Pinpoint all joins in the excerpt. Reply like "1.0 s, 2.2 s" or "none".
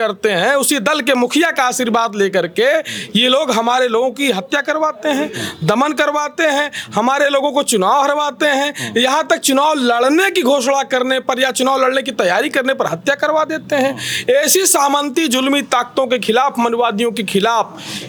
none

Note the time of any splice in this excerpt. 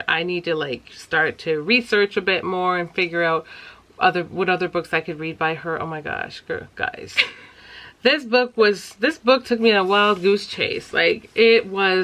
none

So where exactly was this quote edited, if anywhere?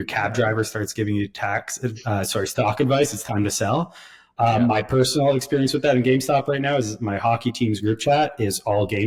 none

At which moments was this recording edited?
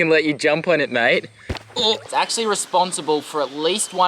2.0 s

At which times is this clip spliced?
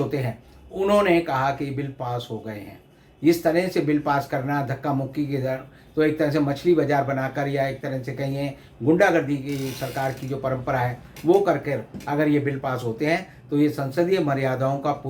none

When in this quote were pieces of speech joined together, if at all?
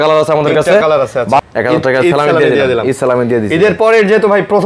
1.4 s

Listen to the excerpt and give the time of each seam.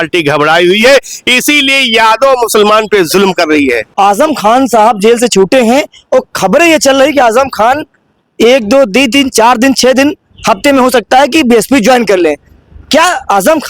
3.8 s

